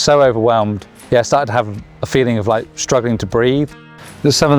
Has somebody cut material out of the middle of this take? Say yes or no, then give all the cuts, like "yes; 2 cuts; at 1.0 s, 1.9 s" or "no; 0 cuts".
yes; 2 cuts; at 0.9 s, 3.7 s